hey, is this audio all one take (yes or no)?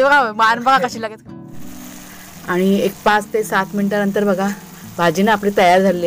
no